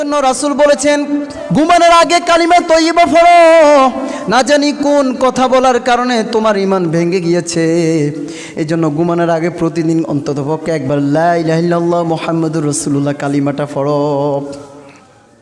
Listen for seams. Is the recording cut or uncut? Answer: cut